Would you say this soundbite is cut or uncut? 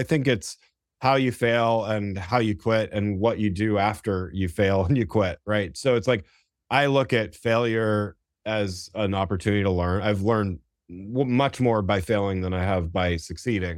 uncut